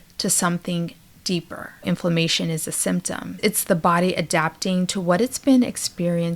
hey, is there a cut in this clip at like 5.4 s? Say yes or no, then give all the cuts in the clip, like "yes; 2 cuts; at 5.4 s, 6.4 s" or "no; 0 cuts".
no; 2 cuts; at 1.8 s, 3.4 s